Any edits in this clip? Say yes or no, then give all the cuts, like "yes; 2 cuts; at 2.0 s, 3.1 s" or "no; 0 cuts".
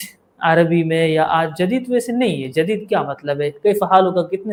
no; 0 cuts